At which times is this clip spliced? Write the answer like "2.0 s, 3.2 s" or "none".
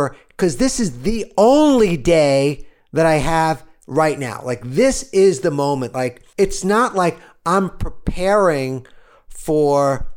6.2 s